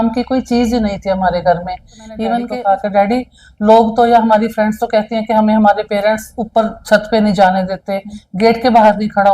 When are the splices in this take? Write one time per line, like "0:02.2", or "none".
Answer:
0:02.4